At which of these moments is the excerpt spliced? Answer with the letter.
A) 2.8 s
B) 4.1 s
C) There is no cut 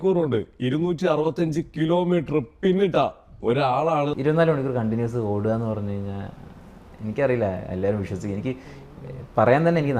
B